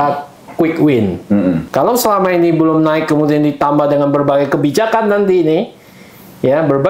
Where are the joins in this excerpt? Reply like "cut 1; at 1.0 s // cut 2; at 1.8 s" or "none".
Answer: cut 1; at 1.6 s